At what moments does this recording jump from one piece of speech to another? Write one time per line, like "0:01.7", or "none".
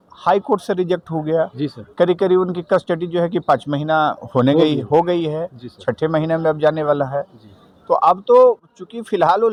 none